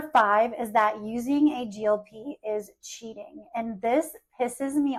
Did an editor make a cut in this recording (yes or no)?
no